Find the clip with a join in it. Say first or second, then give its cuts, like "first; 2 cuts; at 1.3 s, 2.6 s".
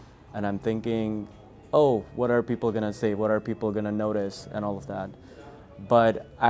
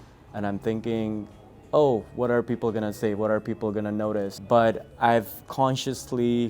second; 1 cut; at 4.4 s